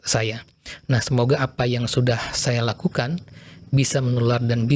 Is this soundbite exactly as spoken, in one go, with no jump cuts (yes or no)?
yes